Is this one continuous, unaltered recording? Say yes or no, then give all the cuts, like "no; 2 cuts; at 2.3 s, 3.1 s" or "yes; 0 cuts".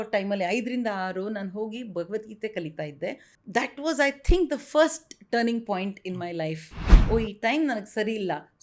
no; 2 cuts; at 3.3 s, 6.9 s